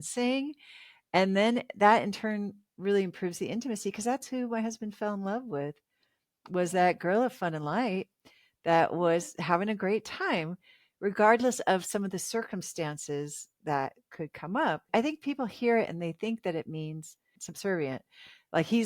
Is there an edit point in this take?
yes; 2 cuts; at 14.9 s, 17.4 s

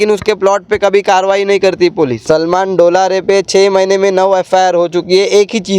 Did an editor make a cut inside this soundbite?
yes; 1 cut; at 2.2 s

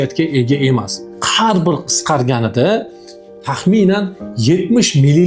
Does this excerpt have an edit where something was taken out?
yes; 1 cut; at 1.1 s

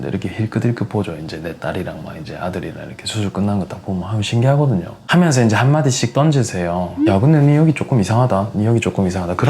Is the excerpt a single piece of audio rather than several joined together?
no; 1 cut; at 5.0 s

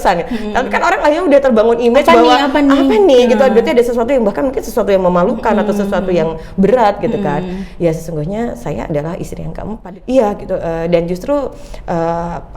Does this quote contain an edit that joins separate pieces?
yes; 1 cut; at 9.8 s

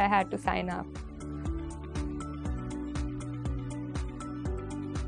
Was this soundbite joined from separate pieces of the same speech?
yes; 2 cuts; at 1.0 s, 3.9 s

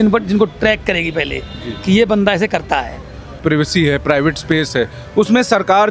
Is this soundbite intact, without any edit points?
no; 1 cut; at 3.4 s

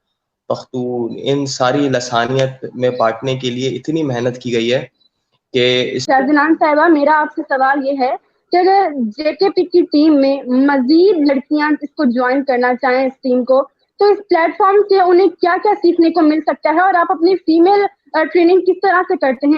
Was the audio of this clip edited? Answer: yes; 1 cut; at 6.0 s

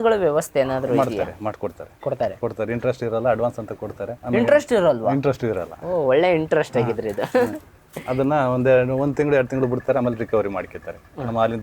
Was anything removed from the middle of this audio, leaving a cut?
no; 0 cuts

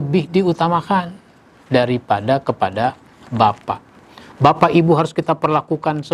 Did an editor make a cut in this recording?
no; 0 cuts

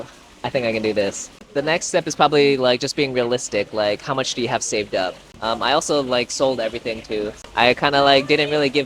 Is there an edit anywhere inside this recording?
yes; 3 cuts; at 1.4 s, 5.3 s, 7.4 s

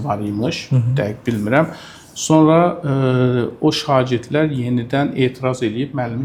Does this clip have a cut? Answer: no; 0 cuts

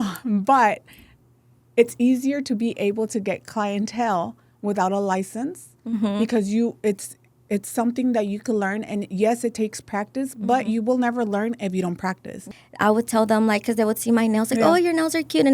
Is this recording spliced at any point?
yes; 1 cut; at 12.4 s

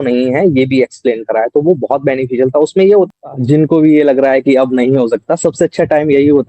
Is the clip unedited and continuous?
no; 1 cut; at 3.1 s

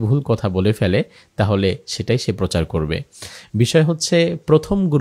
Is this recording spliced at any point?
no; 0 cuts

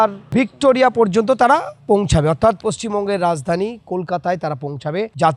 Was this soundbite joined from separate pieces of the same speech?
no; 0 cuts

